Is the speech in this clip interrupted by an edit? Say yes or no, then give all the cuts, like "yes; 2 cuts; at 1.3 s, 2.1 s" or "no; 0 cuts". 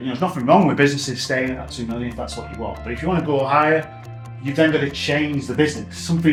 no; 0 cuts